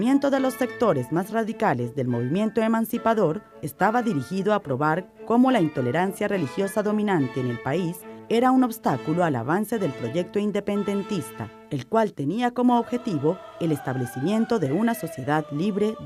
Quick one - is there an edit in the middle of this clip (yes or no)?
no